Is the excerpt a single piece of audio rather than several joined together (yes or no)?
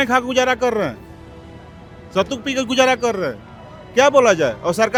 yes